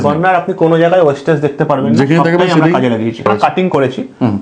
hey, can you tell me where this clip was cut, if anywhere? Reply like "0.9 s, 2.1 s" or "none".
3.3 s